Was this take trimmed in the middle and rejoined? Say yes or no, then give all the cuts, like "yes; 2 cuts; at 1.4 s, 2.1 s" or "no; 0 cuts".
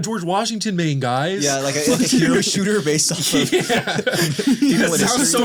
no; 0 cuts